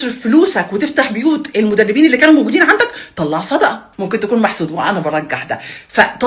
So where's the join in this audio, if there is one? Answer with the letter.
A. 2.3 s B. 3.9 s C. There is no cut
B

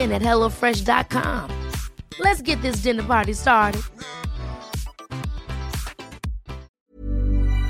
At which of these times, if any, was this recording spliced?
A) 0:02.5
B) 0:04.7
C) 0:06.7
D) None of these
C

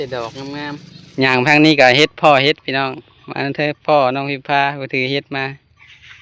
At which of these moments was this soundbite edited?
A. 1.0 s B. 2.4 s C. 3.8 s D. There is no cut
A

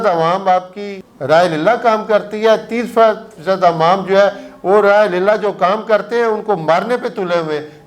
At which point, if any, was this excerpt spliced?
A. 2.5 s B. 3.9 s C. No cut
C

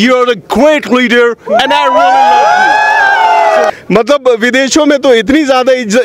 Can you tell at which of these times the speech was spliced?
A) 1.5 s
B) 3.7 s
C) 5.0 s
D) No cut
B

